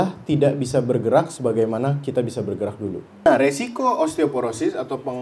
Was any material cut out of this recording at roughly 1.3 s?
no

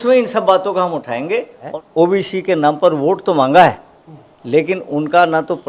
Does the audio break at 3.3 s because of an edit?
no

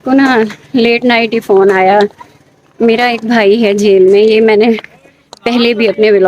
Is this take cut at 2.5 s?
no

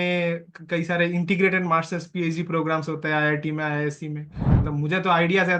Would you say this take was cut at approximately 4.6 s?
yes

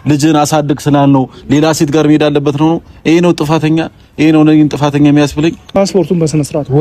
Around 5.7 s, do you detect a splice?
yes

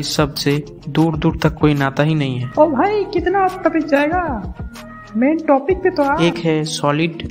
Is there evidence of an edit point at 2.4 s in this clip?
yes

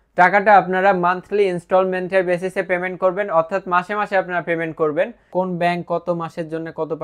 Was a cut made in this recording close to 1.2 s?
no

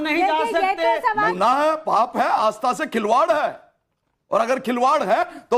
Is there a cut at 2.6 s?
no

